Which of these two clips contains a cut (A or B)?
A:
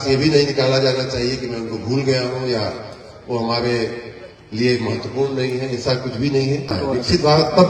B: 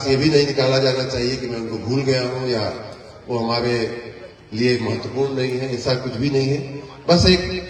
A